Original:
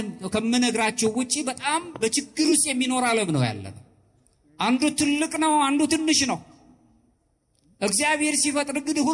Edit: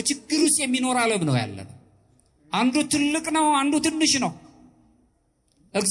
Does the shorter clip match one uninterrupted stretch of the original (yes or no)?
yes